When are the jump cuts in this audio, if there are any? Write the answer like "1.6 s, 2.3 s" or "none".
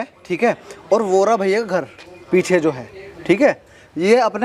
none